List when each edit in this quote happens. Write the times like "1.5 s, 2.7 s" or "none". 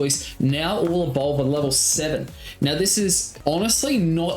3.3 s